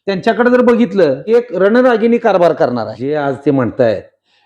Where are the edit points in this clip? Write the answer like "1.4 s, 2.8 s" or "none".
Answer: 1.2 s, 3.0 s

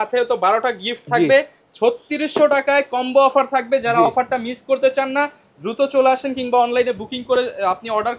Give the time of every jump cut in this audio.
none

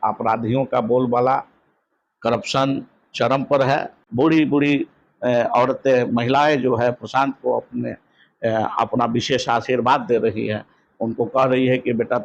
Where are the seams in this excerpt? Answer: 4.0 s

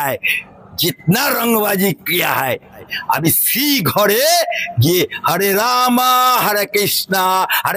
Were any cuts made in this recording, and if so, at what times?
2.9 s

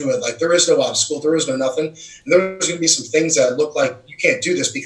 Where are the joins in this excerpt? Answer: none

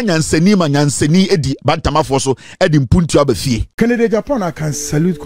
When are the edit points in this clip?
3.8 s

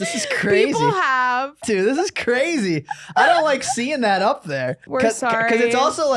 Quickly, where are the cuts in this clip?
1.6 s, 4.8 s

